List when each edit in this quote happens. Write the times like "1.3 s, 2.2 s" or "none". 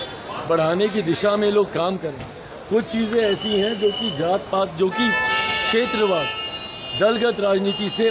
none